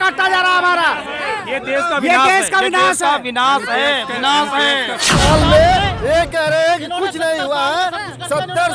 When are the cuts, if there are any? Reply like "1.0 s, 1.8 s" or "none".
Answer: 5.1 s